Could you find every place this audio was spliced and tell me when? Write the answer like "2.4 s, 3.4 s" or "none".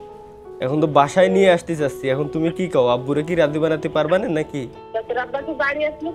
4.8 s